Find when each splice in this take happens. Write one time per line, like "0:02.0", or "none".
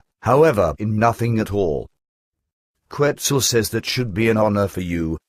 none